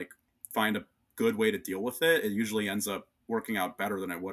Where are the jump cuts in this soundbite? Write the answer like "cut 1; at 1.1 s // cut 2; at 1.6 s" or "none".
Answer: none